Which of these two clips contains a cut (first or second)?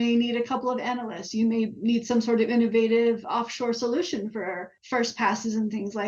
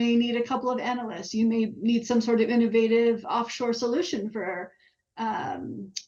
first